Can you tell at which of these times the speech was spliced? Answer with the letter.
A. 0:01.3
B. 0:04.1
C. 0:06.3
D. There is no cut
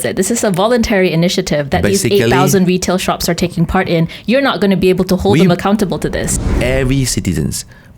C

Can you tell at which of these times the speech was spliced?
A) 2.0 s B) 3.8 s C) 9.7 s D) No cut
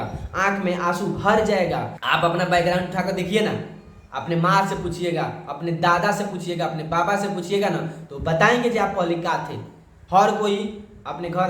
A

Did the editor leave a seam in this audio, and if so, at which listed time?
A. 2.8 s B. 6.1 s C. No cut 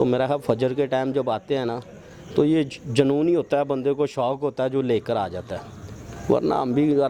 C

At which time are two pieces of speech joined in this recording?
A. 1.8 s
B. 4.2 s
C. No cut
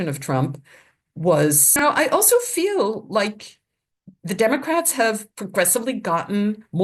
A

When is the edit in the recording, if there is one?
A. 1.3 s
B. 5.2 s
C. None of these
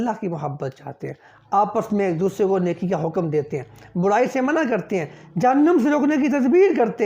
A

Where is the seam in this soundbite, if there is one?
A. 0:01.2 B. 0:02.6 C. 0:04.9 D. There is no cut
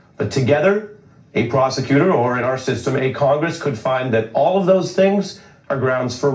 C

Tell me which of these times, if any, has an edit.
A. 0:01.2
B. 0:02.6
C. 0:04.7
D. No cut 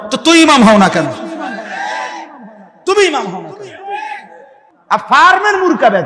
C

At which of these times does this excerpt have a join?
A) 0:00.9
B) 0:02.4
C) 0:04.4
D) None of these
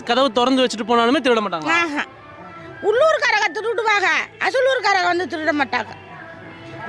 D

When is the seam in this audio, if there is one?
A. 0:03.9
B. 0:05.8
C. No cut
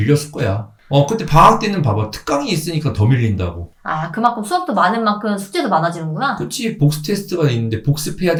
C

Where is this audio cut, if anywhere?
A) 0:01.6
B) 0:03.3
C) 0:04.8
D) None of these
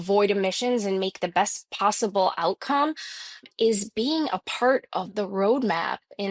B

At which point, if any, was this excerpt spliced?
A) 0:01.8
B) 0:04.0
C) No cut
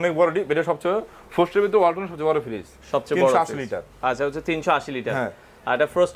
C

